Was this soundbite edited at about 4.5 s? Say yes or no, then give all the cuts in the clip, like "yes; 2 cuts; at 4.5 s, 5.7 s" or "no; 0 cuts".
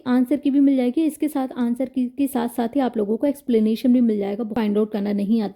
yes; 1 cut; at 4.5 s